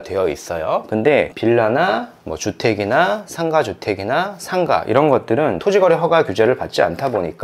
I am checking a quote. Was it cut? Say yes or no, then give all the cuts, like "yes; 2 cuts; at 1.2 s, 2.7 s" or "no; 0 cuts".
yes; 2 cuts; at 1.3 s, 5.6 s